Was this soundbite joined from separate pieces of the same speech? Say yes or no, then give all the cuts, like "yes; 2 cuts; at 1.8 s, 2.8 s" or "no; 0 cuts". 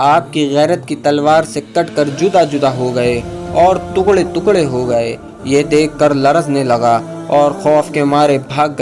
no; 0 cuts